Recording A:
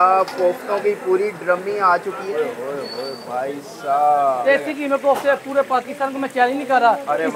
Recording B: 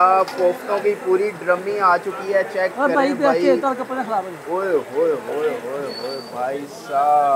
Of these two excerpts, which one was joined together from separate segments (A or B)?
A